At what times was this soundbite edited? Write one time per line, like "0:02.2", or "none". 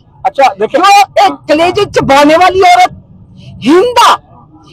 none